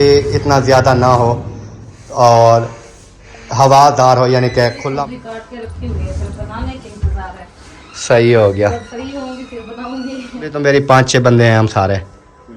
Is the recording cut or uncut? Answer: cut